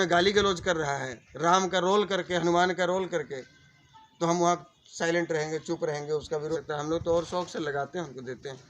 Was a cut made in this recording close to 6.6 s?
yes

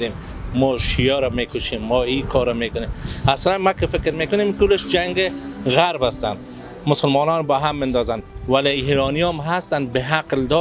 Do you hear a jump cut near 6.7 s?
no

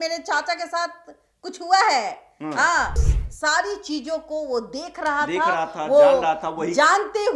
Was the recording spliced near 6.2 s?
no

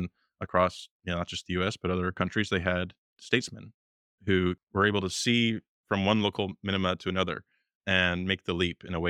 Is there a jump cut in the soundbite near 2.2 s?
yes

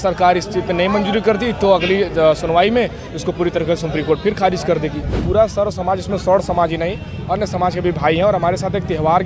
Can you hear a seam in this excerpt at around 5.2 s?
yes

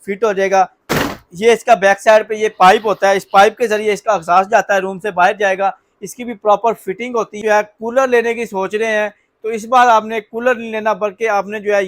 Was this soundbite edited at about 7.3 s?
yes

